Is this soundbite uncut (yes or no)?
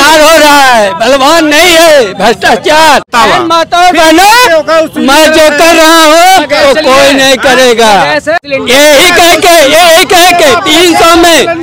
no